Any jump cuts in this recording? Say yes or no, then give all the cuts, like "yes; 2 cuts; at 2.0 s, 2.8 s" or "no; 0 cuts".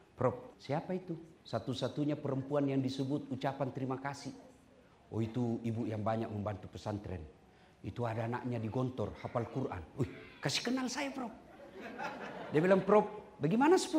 yes; 1 cut; at 1.0 s